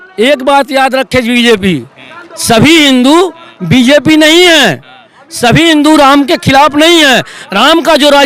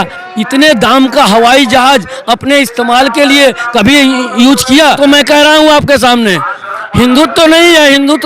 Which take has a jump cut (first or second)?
second